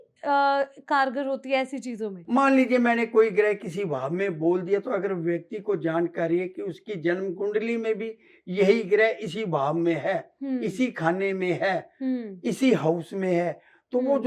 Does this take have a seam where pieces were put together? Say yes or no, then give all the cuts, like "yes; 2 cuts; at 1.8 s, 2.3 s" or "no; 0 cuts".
yes; 1 cut; at 2.2 s